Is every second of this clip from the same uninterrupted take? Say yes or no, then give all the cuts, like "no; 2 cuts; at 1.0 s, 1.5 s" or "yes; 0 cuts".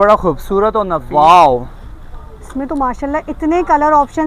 no; 1 cut; at 1.0 s